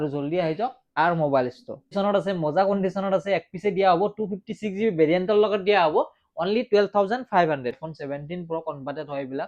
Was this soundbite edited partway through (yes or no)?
yes